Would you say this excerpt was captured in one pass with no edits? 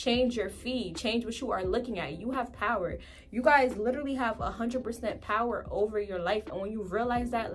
yes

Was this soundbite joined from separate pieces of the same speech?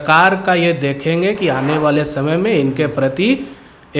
no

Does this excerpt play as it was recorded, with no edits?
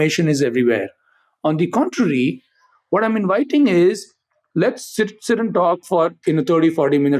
yes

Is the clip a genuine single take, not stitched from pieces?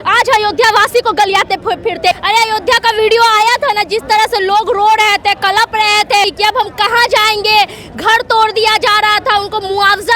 no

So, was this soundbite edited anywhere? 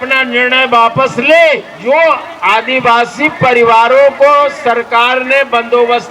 yes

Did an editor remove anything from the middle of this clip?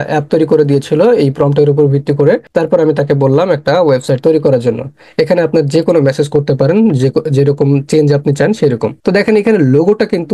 no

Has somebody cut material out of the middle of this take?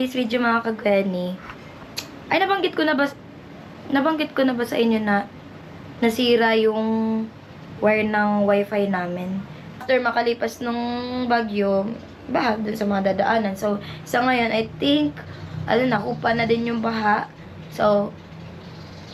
yes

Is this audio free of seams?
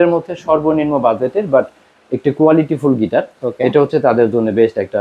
yes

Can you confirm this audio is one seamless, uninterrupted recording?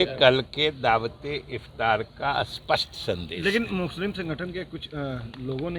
yes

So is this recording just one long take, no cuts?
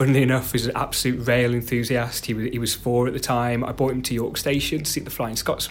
yes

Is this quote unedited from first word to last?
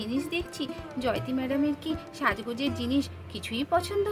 yes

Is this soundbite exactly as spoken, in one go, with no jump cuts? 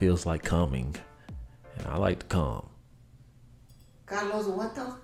yes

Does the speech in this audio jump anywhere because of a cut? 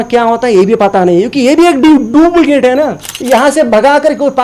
yes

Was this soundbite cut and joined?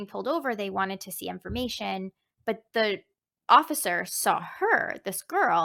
no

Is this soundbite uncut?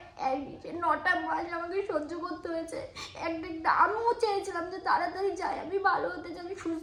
yes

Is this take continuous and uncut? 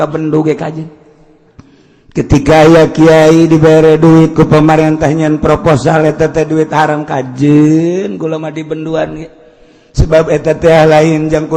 yes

